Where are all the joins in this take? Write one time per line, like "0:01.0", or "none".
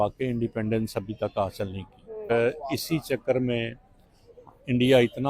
0:02.3